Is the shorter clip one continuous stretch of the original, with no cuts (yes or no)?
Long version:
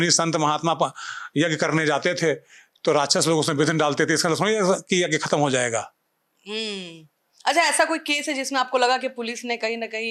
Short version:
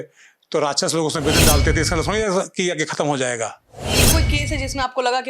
no